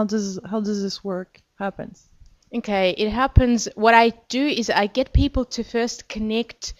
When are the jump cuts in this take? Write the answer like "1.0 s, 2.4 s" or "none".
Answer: 3.0 s